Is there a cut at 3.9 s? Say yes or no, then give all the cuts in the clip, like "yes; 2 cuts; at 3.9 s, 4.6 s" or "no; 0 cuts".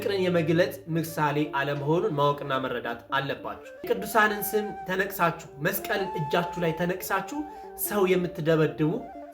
yes; 1 cut; at 3.9 s